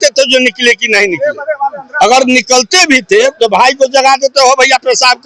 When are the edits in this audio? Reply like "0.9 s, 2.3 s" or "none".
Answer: none